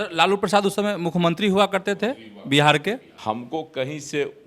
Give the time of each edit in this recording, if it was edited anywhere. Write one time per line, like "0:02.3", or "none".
0:03.1